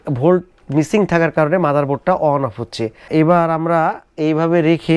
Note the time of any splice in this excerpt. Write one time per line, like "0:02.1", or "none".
0:03.0